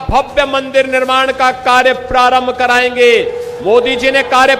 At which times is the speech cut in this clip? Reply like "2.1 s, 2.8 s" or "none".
none